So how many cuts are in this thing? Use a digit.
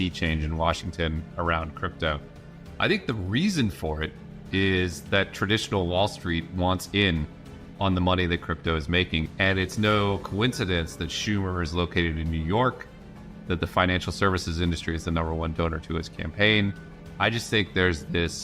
1